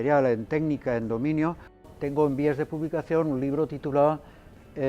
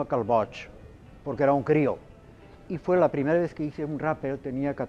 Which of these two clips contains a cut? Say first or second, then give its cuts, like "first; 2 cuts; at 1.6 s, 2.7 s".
first; 1 cut; at 1.9 s